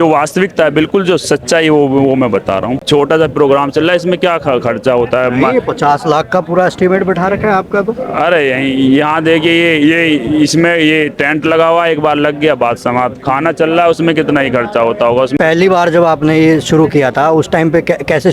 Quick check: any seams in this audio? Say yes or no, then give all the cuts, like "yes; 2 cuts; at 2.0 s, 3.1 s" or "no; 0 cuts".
yes; 2 cuts; at 2.8 s, 15.3 s